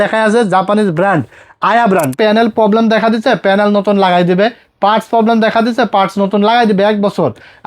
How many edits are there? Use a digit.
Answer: 1